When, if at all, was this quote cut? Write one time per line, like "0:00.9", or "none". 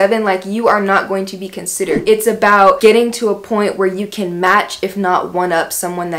0:02.0